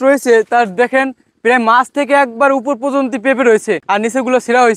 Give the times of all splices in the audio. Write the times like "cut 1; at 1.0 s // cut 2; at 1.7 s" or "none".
cut 1; at 3.8 s